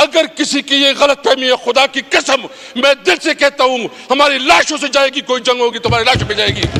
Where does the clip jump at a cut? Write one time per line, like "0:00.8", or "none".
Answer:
none